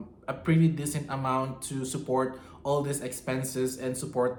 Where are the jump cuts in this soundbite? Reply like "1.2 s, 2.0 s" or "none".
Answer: none